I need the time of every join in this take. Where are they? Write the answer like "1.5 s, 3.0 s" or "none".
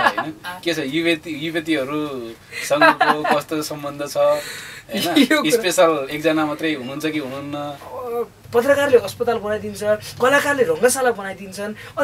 8.4 s